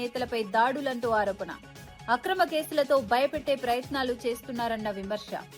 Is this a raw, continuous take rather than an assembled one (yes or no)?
yes